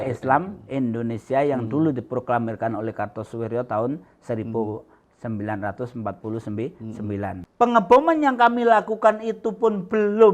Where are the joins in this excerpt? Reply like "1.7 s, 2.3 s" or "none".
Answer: 7.4 s

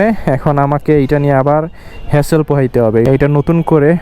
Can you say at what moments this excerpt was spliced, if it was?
3.1 s

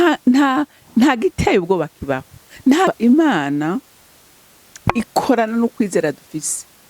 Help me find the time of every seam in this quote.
2.9 s

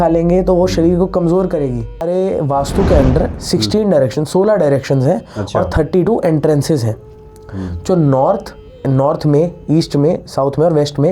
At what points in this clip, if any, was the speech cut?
2.0 s

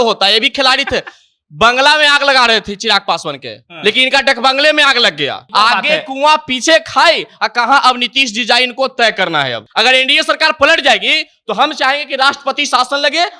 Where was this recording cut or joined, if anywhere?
5.4 s, 9.6 s

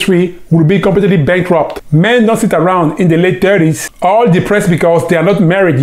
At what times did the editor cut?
none

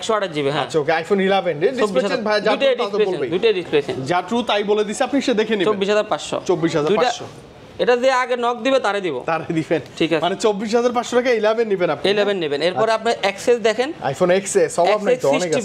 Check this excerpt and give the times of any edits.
none

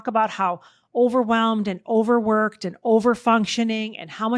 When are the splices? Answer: none

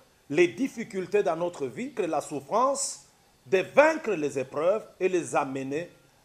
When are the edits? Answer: 1.9 s

